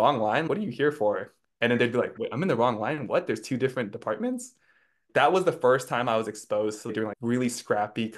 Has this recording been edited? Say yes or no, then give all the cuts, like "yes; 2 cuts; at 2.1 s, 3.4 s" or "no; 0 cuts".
no; 0 cuts